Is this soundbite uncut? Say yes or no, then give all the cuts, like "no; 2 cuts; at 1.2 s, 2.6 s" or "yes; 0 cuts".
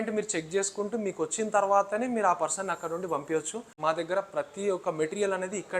no; 1 cut; at 3.7 s